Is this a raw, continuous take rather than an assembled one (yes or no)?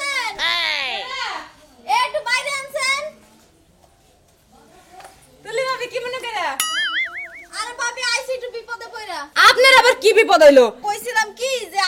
no